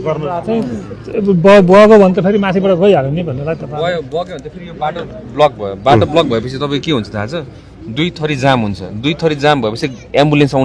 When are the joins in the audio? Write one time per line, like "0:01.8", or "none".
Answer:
none